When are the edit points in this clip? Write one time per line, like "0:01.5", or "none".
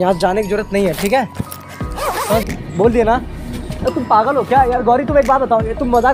0:02.5